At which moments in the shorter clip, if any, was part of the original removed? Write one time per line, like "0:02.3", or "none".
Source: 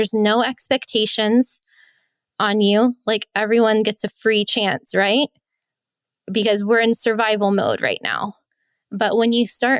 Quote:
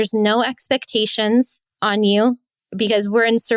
0:01.7
0:02.4